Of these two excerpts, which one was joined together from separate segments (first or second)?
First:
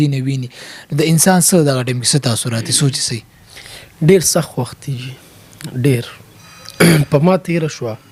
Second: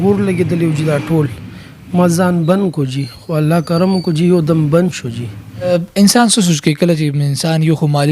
second